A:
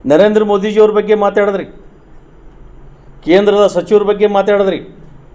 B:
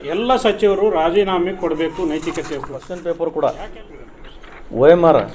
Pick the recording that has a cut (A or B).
B